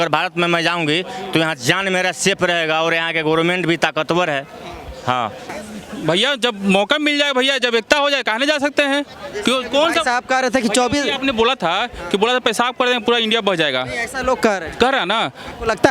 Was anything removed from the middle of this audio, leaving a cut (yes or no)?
yes